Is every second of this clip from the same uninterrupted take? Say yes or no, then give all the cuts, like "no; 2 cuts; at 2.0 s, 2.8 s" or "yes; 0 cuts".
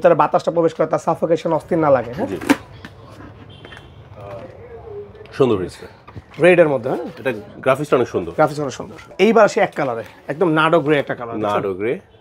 no; 2 cuts; at 2.7 s, 9.0 s